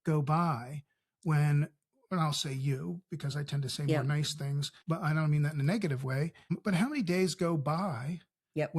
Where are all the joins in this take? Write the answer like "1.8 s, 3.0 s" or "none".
4.7 s, 6.6 s